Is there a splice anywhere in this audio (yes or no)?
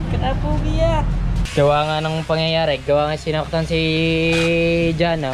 yes